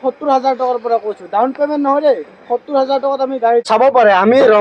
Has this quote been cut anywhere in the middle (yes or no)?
yes